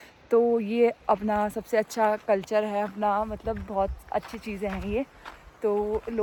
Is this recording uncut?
yes; 0 cuts

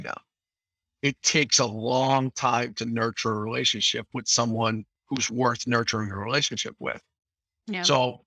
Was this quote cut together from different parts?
no; 0 cuts

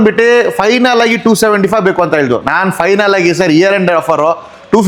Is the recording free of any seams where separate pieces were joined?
yes; 0 cuts

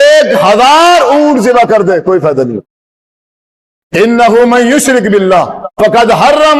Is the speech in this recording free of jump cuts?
yes; 0 cuts

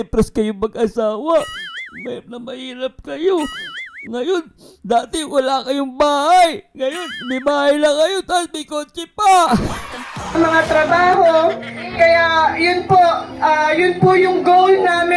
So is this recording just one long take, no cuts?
no; 1 cut; at 10.5 s

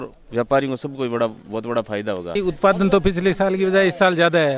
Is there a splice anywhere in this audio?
yes; 1 cut; at 2.4 s

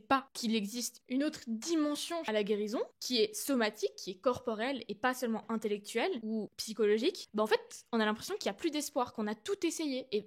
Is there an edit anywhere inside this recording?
yes; 2 cuts; at 1.0 s, 2.3 s

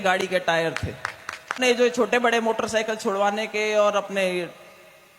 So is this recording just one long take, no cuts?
no; 1 cut; at 1.6 s

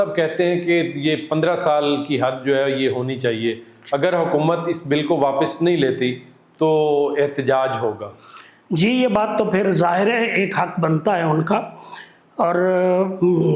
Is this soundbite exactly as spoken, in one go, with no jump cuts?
yes; 0 cuts

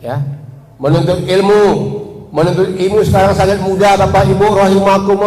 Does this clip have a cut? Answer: no; 0 cuts

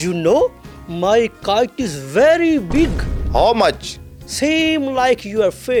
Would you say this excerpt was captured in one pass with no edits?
yes; 0 cuts

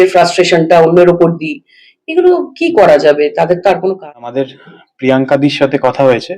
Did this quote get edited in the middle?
yes; 1 cut; at 4.0 s

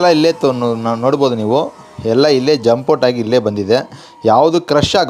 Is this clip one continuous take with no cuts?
yes; 0 cuts

